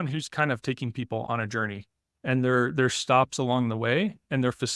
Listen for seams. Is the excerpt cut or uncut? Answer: uncut